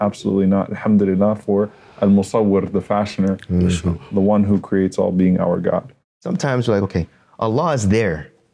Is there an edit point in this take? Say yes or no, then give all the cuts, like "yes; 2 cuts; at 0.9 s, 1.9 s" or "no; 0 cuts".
yes; 1 cut; at 6.2 s